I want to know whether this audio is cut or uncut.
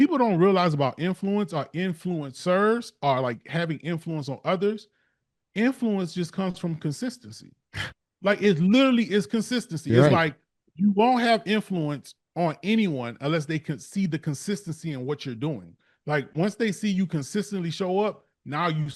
uncut